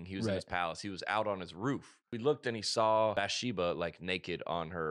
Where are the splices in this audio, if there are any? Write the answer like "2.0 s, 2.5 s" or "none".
2.0 s, 3.1 s